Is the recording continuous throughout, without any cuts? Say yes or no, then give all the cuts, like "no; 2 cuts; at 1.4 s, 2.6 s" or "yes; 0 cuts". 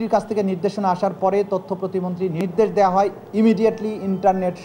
no; 1 cut; at 2.4 s